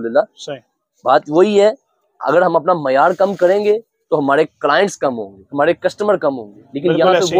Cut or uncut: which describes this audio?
uncut